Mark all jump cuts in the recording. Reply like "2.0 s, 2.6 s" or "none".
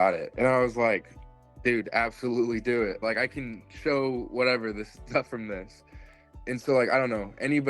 6.2 s